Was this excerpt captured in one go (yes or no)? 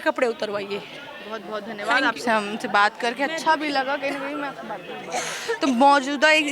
yes